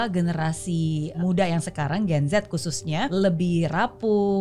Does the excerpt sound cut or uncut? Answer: cut